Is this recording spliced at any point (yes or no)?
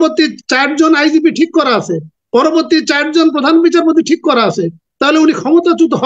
no